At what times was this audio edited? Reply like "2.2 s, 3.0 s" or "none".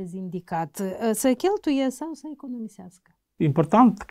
none